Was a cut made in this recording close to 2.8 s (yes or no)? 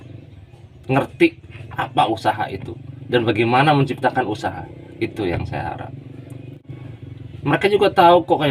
no